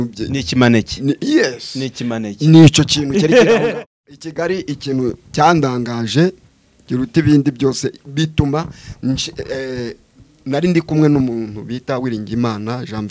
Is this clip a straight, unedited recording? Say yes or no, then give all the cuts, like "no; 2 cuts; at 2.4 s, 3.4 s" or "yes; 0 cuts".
no; 1 cut; at 3.7 s